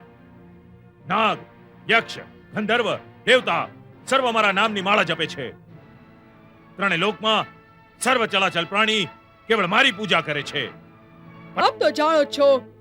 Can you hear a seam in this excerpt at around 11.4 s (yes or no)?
yes